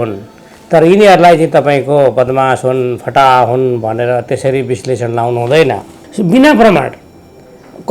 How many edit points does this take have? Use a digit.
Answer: 1